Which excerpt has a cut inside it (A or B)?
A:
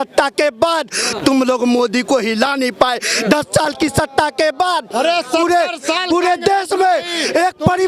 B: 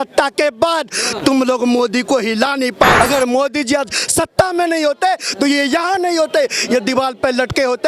B